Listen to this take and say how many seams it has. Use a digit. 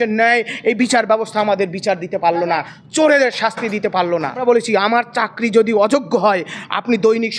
1